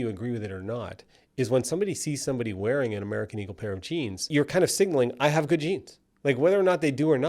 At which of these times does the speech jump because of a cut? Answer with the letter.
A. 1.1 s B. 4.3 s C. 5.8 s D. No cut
B